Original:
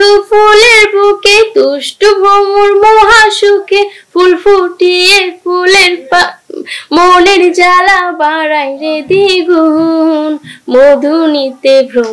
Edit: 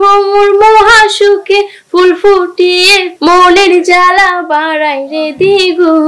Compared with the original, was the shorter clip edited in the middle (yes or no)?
yes